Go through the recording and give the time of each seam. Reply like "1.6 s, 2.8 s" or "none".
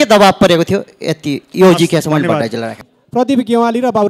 none